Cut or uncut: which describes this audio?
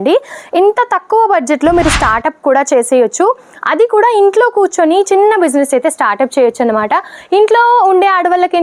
uncut